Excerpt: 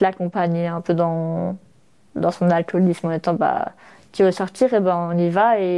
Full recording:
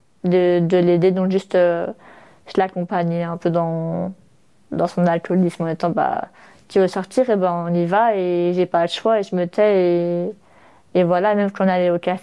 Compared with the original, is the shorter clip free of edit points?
yes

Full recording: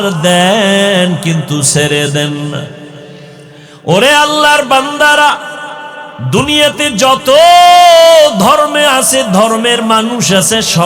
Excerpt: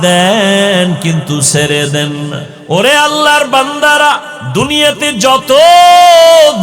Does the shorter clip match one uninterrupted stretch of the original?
no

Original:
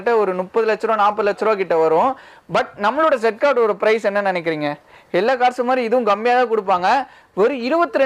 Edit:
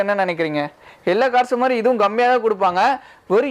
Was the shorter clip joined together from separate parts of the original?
no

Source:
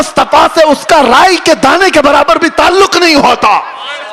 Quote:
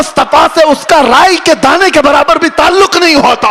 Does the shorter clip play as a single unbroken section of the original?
yes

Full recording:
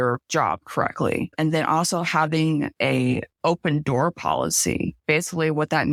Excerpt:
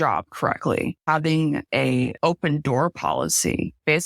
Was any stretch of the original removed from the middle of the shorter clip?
yes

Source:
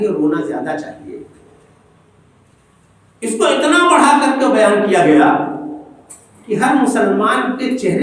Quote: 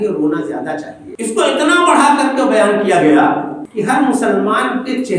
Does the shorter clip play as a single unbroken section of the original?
no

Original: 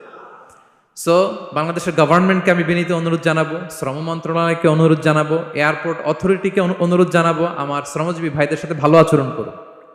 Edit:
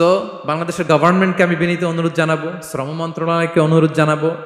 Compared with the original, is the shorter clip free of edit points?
yes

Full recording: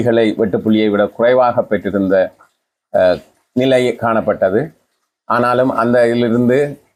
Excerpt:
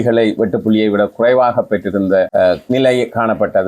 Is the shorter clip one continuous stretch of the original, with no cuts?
no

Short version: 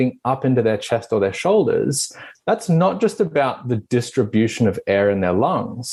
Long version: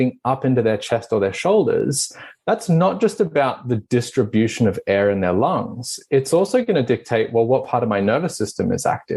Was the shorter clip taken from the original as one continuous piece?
yes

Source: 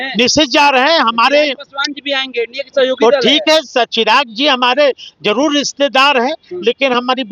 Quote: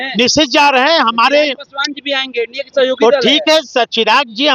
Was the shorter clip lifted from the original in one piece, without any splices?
yes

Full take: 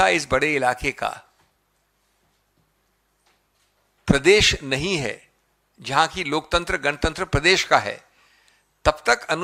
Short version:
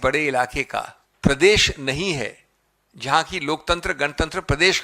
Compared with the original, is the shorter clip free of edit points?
no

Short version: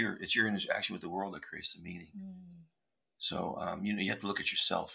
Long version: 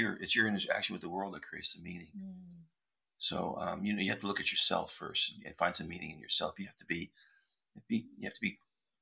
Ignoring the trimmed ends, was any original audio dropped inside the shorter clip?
no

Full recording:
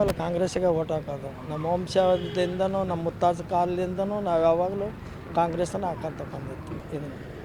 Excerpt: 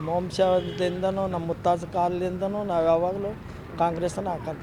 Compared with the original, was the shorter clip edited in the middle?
no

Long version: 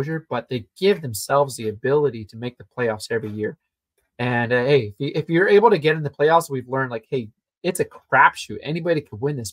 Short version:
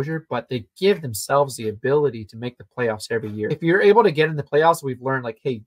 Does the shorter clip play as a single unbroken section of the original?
no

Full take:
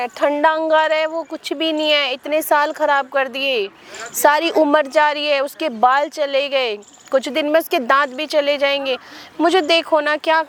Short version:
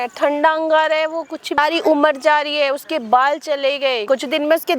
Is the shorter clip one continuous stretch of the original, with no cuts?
no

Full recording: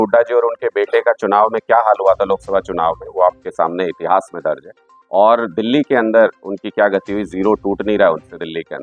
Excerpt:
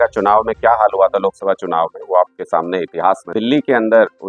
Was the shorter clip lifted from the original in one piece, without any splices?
no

